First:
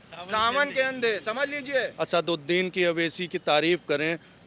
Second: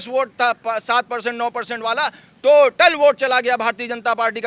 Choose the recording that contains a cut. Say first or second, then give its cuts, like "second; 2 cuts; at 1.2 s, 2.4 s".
first; 1 cut; at 2.0 s